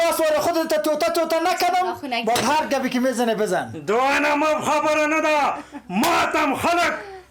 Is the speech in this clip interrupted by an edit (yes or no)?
no